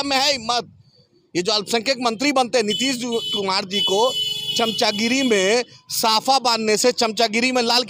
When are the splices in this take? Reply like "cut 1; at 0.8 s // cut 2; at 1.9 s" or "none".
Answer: none